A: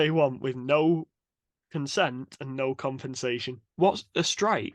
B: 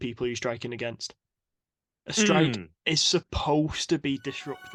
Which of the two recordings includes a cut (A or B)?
A